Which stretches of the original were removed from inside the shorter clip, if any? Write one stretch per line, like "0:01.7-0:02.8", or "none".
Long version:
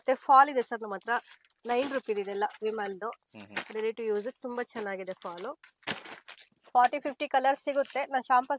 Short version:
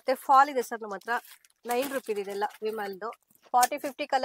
0:03.3-0:06.5